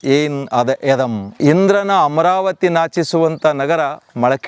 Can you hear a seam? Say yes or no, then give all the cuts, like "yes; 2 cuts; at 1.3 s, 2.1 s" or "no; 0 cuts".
yes; 1 cut; at 1.4 s